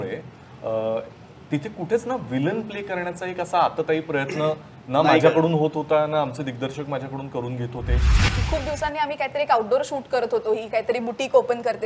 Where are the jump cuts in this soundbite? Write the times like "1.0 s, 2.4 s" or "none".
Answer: 8.2 s

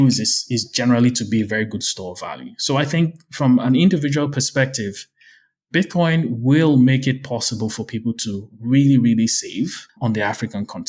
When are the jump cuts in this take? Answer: 9.9 s

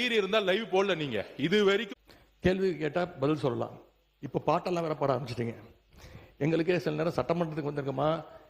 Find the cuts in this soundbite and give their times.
1.9 s

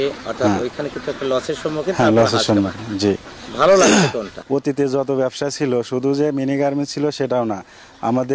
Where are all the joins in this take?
4.3 s

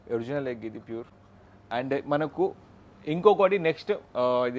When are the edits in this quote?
none

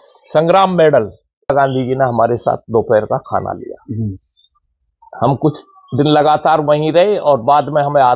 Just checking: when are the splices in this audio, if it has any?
1.5 s

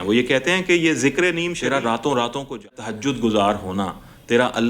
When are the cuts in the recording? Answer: 1.5 s, 2.8 s

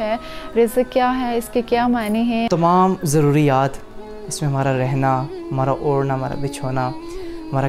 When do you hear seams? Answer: 2.5 s

